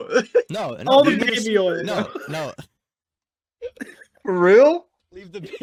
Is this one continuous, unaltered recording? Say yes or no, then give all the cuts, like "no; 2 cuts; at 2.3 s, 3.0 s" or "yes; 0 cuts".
yes; 0 cuts